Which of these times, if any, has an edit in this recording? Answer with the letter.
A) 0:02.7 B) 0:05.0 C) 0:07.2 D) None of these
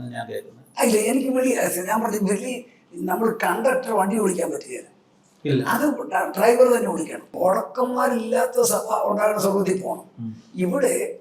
C